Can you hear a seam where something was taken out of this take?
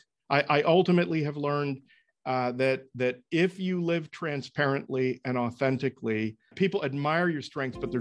yes; 1 cut; at 6.5 s

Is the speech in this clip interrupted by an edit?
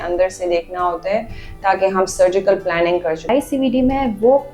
yes; 1 cut; at 3.3 s

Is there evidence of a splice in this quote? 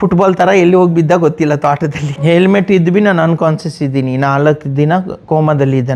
yes; 1 cut; at 2.1 s

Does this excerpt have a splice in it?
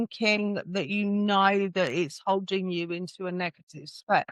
no; 0 cuts

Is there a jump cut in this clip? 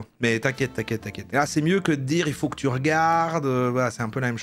no; 0 cuts

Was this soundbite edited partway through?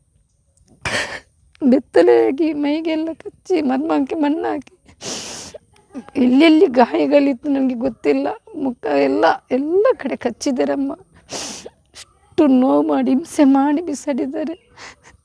no; 0 cuts

